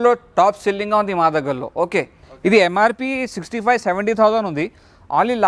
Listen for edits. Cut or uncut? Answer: cut